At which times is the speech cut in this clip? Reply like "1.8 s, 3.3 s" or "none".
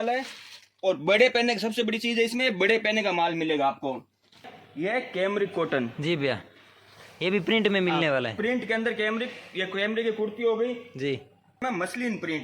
4.5 s, 11.6 s

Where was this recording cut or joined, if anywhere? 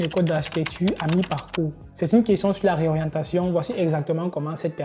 1.8 s

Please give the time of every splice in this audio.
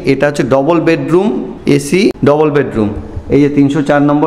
1.9 s

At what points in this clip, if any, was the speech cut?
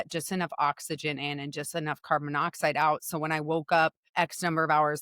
4.0 s

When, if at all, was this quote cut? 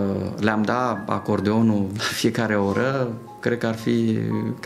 none

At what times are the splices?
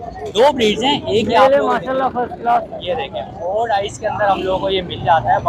none

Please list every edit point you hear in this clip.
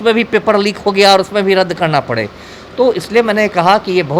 none

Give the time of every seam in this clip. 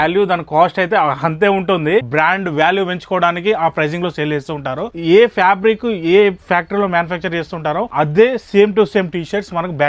2.1 s, 5.0 s, 7.9 s

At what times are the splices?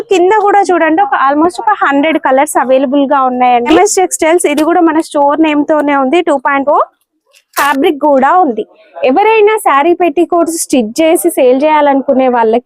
3.7 s, 7.6 s

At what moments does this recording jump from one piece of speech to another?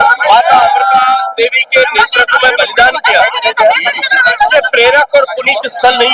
none

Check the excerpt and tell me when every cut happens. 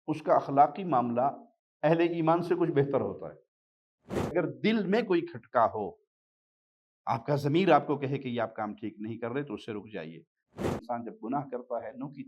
4.3 s, 10.6 s

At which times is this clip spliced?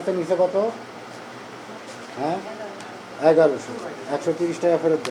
none

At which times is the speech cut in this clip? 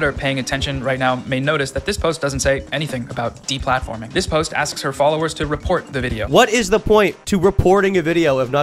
6.2 s

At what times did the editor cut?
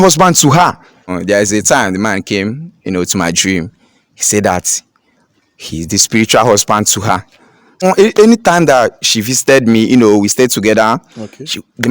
1.1 s, 7.8 s

